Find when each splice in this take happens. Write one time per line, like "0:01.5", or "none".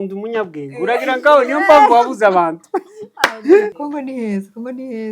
0:03.8